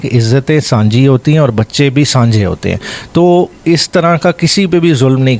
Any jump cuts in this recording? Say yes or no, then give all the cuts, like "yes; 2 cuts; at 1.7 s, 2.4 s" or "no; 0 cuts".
no; 0 cuts